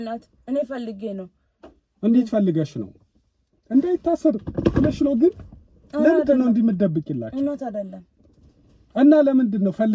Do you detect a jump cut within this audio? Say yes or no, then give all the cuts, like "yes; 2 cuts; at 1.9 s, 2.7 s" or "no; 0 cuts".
no; 0 cuts